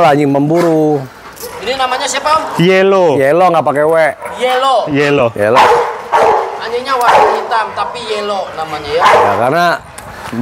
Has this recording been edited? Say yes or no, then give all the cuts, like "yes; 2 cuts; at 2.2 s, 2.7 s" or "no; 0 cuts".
no; 0 cuts